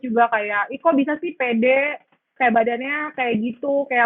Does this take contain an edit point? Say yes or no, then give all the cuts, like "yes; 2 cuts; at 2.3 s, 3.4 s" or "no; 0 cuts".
no; 0 cuts